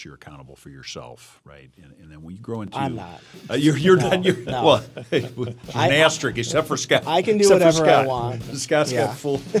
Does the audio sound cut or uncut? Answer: uncut